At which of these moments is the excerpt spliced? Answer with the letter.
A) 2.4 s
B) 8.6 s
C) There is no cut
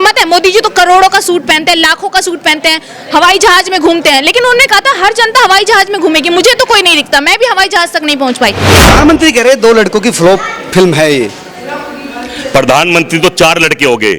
B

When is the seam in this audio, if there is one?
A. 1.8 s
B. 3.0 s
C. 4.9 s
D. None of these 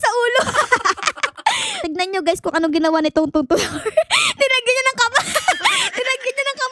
A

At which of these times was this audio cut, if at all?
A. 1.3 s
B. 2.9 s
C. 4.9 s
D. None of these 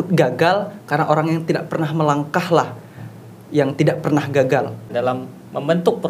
C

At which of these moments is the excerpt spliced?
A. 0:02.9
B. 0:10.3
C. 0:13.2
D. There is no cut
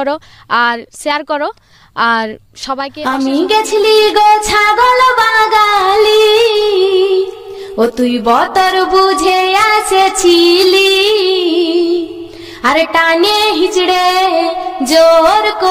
A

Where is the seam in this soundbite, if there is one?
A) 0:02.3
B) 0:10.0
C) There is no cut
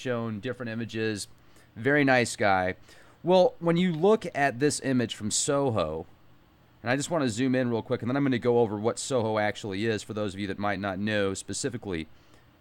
A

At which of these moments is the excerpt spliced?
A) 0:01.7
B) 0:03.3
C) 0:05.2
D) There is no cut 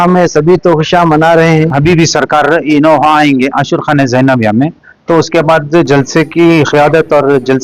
A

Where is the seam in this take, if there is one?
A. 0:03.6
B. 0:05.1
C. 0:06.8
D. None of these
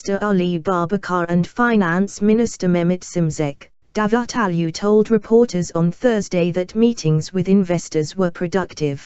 B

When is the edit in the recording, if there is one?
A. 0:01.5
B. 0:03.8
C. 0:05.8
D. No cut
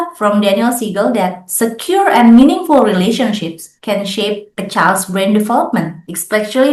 D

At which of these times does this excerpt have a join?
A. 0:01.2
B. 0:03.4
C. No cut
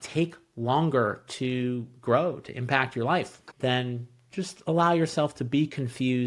B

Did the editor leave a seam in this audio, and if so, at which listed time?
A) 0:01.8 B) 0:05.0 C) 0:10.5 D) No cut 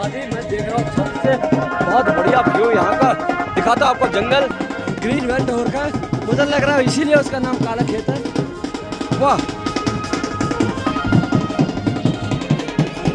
B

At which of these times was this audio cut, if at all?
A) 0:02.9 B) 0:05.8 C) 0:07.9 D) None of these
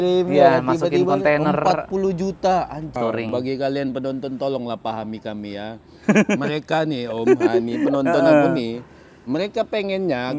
A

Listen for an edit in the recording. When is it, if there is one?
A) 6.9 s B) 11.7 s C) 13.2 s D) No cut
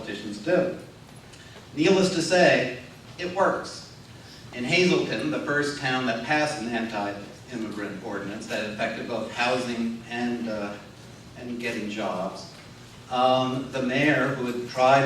B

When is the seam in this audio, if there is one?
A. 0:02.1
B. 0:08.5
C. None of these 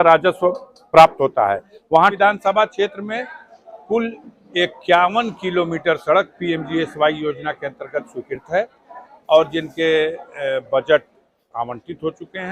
A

